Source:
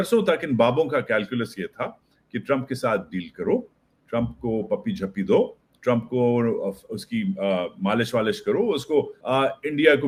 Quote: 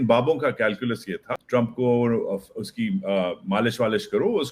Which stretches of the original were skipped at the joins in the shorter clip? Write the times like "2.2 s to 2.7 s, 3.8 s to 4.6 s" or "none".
1.8 s to 5.7 s